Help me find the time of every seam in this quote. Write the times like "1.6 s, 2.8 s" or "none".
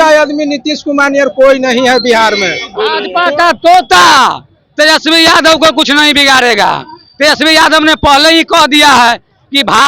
3.0 s